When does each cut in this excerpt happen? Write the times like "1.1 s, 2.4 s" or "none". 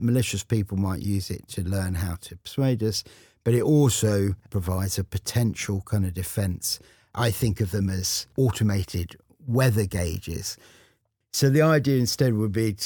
4.5 s, 7.1 s, 8.2 s, 11.0 s